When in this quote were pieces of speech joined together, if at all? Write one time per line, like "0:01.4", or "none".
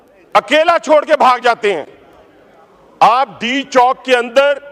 none